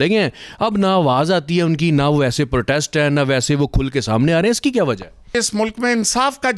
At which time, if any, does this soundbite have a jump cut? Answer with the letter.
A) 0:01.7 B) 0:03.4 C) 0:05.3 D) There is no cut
C